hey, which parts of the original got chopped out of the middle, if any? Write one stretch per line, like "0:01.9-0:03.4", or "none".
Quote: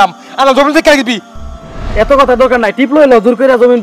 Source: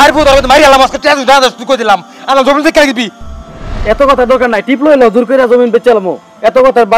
none